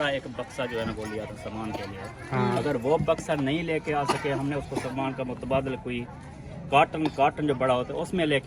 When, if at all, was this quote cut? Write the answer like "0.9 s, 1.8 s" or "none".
none